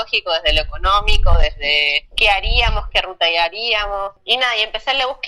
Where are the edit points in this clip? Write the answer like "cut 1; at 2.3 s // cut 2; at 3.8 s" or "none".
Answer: cut 1; at 4.2 s

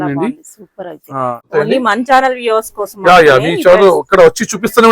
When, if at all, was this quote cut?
cut 1; at 1.5 s

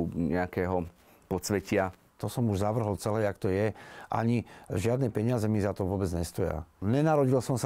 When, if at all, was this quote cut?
cut 1; at 2.1 s // cut 2; at 6.7 s

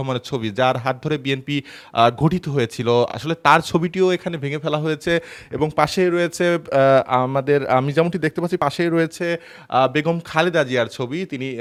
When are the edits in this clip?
none

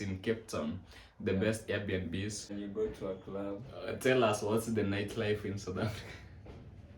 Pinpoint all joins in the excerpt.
cut 1; at 2.5 s

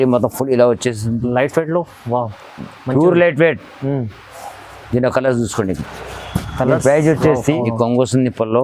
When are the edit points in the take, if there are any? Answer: cut 1; at 7.6 s

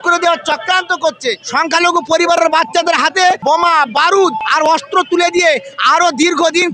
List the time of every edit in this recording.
cut 1; at 1.4 s // cut 2; at 3.4 s // cut 3; at 4.4 s

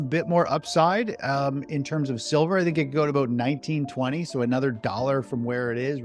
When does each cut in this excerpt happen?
none

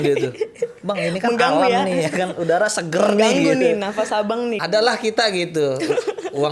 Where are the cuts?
cut 1; at 4.6 s

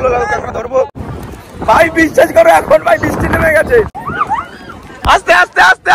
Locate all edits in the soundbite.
cut 1; at 1.5 s

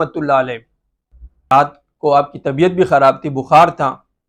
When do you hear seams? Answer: cut 1; at 1.5 s

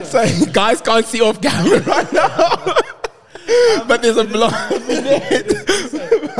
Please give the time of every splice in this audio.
none

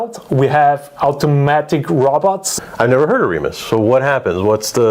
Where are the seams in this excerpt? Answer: cut 1; at 2.5 s

